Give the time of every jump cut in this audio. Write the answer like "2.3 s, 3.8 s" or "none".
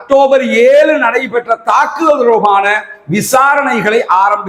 none